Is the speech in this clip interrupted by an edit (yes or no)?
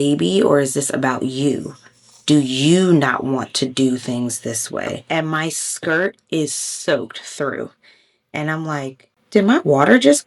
yes